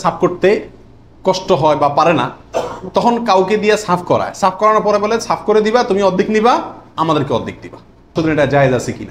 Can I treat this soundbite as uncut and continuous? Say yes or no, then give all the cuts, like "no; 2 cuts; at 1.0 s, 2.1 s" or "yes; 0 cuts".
no; 1 cut; at 8.1 s